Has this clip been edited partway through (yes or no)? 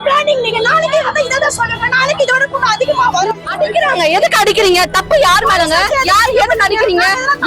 yes